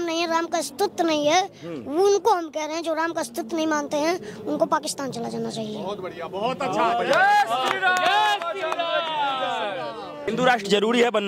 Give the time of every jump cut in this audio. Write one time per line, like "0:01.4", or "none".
0:10.3